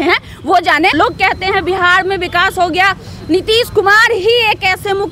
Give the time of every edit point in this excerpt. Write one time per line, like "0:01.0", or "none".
0:01.0